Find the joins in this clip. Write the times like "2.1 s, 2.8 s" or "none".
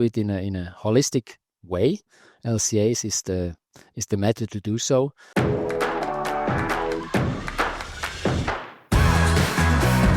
5.2 s